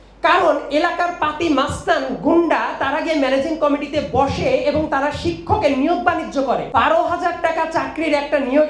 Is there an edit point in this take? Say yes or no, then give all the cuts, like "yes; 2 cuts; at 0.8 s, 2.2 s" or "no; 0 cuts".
yes; 1 cut; at 6.7 s